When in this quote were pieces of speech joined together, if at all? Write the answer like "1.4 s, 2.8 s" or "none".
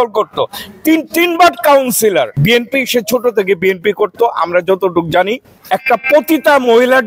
2.3 s, 5.5 s